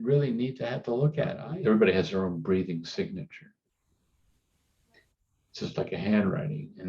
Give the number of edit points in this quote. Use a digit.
1